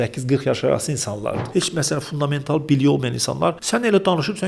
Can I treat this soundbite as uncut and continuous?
no; 2 cuts; at 1.4 s, 3.6 s

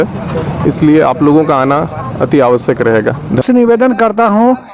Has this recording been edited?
no; 0 cuts

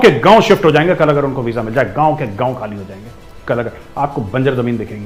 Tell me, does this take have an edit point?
no; 0 cuts

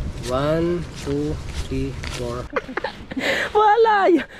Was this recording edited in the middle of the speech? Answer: yes; 1 cut; at 2.5 s

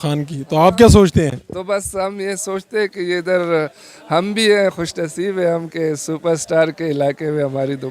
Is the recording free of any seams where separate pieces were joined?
yes; 0 cuts

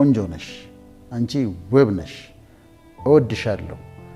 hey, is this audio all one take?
yes; 0 cuts

